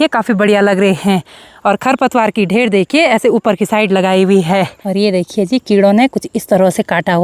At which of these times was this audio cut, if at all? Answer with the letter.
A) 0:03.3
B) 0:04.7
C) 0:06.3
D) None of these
B